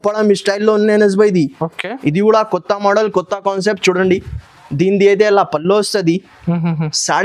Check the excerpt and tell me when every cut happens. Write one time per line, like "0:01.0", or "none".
none